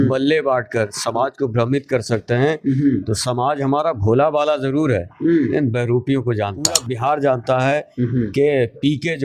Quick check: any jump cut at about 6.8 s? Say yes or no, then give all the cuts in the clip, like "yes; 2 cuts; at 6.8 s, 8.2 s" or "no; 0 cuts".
yes; 1 cut; at 6.8 s